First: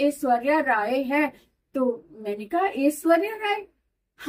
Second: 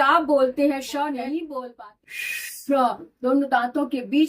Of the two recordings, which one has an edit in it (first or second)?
second